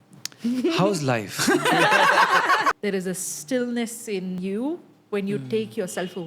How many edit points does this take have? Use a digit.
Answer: 2